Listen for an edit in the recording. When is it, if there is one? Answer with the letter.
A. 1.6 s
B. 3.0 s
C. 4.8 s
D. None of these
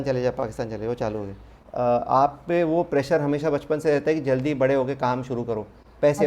A